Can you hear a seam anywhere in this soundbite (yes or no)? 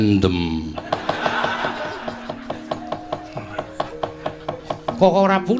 no